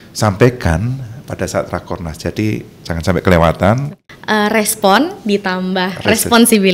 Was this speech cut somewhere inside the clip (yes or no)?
yes